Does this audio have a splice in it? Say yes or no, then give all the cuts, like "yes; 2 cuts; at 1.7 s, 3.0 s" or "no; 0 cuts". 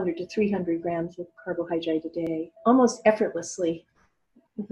yes; 1 cut; at 2.3 s